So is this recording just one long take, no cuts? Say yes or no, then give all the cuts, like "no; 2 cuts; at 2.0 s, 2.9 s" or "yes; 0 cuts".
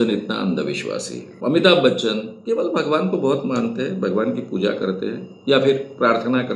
no; 1 cut; at 1.3 s